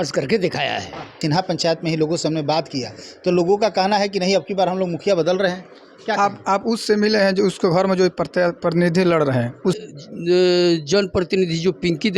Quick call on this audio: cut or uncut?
cut